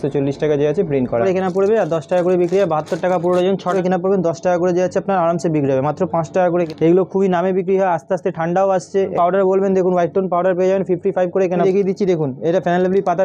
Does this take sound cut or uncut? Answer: cut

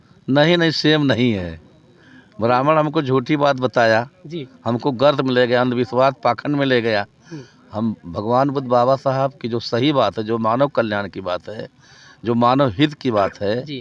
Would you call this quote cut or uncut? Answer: uncut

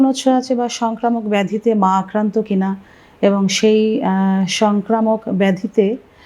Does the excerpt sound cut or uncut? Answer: uncut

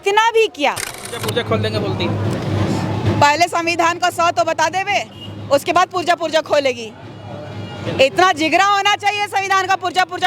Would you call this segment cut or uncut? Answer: cut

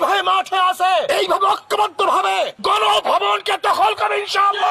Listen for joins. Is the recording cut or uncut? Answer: cut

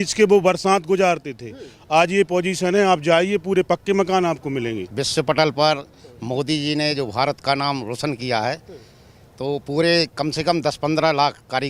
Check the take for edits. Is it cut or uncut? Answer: cut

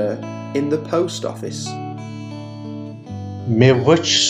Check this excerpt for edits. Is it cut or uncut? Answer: uncut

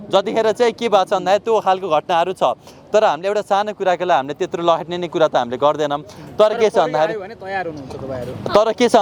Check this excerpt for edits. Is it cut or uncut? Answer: uncut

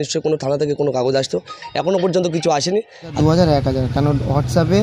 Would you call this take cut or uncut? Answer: cut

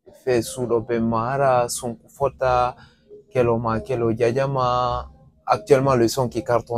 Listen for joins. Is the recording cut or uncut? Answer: uncut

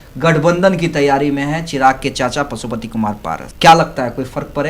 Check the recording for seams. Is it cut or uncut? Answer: cut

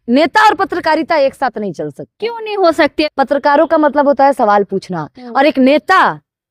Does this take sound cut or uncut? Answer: cut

